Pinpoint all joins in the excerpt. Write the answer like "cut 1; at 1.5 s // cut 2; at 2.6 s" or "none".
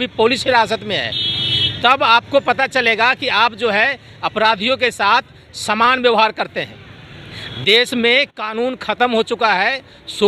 none